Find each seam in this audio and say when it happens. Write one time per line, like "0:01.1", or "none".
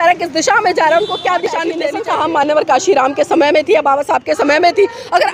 0:01.8